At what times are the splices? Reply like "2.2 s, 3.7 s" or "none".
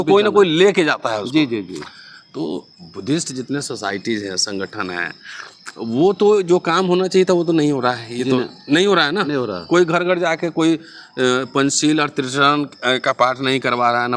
none